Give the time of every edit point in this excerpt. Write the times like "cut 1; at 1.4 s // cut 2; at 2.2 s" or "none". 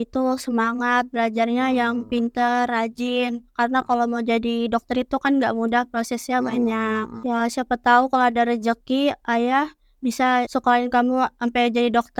none